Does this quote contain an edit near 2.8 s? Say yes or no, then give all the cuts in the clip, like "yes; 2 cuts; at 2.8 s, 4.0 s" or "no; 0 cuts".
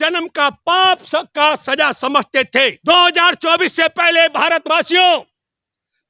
yes; 1 cut; at 2.8 s